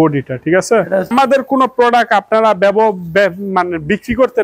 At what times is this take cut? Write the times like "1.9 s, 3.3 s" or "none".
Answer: 1.1 s